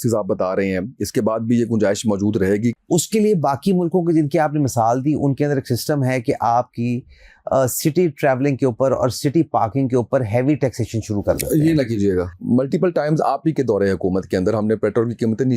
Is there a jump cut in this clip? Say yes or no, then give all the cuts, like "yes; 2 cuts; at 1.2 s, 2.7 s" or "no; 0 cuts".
yes; 2 cuts; at 2.7 s, 12.4 s